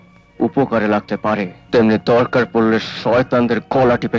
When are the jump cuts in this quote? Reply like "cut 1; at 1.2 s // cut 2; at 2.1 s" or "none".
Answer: cut 1; at 1.6 s